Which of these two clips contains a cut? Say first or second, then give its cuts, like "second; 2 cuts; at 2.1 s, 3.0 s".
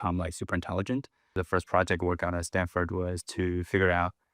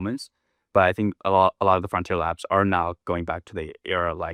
first; 1 cut; at 1.4 s